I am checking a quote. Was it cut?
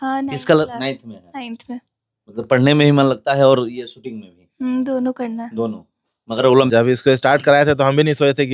yes; 1 cut; at 6.7 s

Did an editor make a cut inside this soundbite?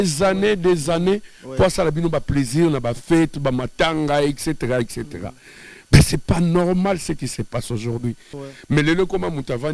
yes; 1 cut; at 8.3 s

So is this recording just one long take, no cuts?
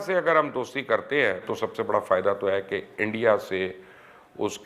no; 1 cut; at 1.5 s

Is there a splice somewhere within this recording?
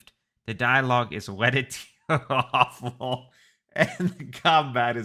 no; 0 cuts

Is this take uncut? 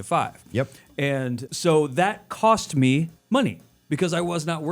no; 1 cut; at 3.2 s

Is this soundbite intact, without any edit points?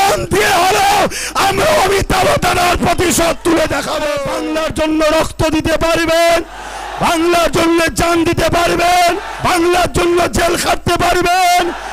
no; 2 cuts; at 4.3 s, 9.3 s

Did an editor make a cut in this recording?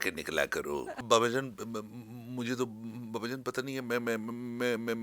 yes; 1 cut; at 0.9 s

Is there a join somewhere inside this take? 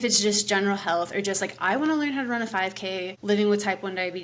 yes; 1 cut; at 3.1 s

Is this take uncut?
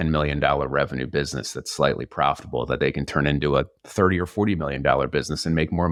yes; 0 cuts

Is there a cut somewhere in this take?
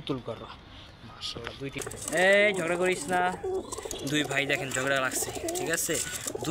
yes; 1 cut; at 1.8 s

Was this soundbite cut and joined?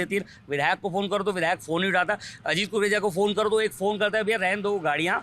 no; 0 cuts

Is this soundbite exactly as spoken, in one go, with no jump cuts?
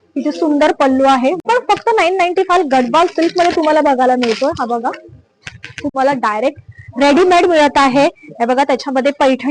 no; 2 cuts; at 1.4 s, 5.9 s

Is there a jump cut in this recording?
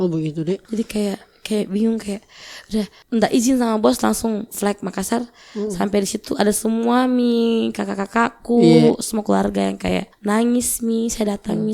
no; 0 cuts

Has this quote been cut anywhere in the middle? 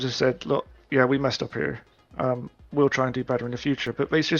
no; 0 cuts

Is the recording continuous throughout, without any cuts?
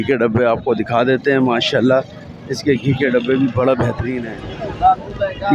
no; 1 cut; at 4.1 s

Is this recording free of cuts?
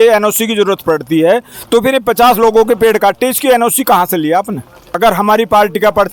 no; 1 cut; at 5.0 s

